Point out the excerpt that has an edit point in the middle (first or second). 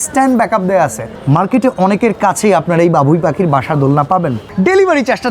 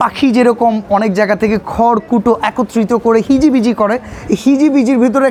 first